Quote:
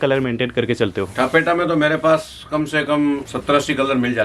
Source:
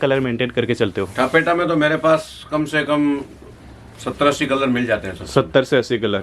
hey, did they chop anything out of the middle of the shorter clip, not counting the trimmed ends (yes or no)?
yes